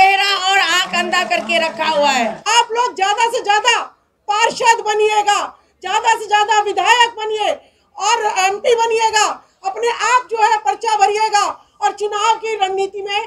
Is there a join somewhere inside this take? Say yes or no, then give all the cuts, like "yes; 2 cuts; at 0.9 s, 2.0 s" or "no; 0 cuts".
yes; 1 cut; at 2.4 s